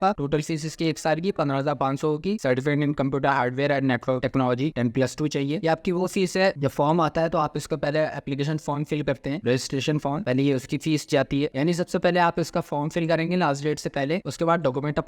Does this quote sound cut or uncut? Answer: cut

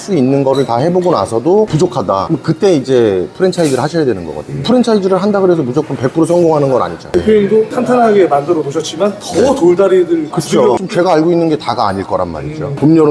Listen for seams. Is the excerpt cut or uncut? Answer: uncut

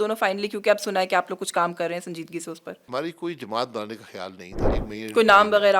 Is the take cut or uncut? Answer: cut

